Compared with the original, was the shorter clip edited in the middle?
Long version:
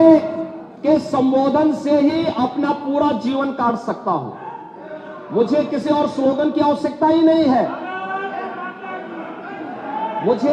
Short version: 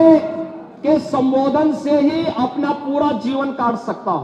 no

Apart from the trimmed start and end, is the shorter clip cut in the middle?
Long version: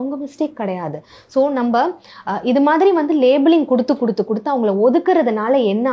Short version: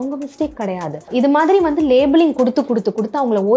yes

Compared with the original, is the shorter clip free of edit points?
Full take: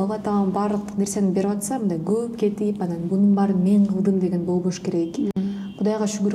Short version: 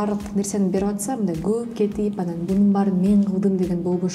yes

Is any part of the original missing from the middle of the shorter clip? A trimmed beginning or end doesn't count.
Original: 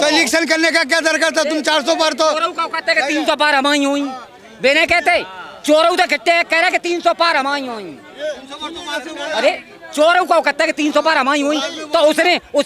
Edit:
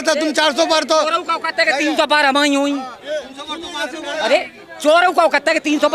yes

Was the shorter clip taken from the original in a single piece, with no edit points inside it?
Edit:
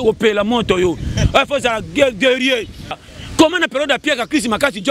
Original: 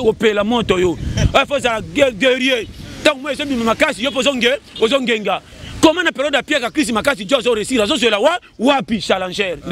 no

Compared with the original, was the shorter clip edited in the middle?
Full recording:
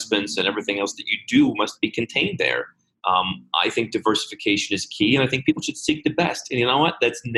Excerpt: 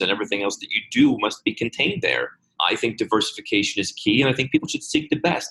yes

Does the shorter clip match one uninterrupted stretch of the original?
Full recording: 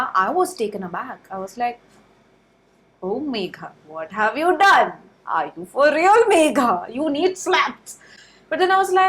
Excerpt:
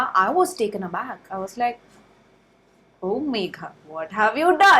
yes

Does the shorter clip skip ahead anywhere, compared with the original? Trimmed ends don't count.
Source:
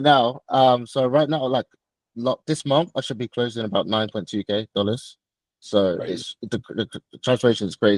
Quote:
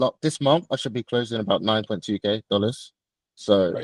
no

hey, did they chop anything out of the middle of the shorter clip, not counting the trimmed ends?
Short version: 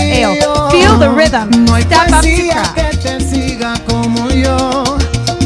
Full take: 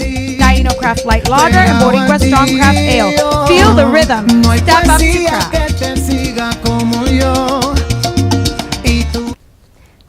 no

